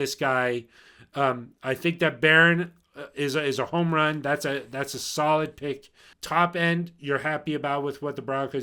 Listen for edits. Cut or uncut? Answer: cut